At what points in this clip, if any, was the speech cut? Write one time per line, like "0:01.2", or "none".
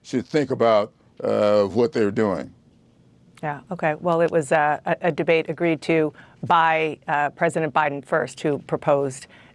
none